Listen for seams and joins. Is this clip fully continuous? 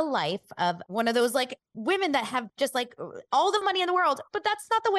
no; 2 cuts; at 0.8 s, 1.6 s

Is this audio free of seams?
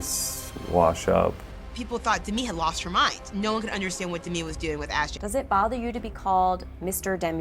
no; 2 cuts; at 1.4 s, 5.1 s

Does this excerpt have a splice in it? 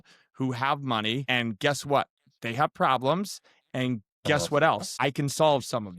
yes; 2 cuts; at 1.2 s, 4.9 s

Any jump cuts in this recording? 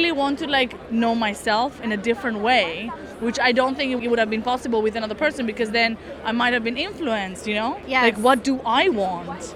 yes; 2 cuts; at 4.0 s, 7.8 s

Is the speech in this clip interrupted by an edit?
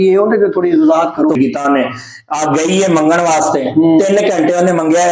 yes; 1 cut; at 1.4 s

